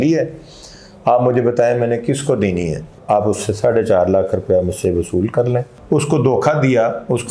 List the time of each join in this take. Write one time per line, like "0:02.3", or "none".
0:02.9
0:05.7